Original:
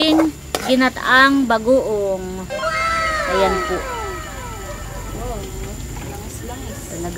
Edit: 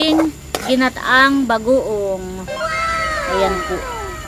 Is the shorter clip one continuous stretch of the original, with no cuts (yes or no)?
yes